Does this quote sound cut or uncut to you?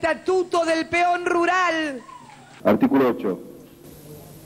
cut